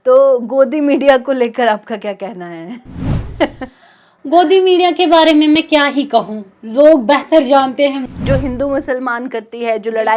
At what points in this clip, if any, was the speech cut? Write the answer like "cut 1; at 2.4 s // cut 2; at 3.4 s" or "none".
cut 1; at 8.1 s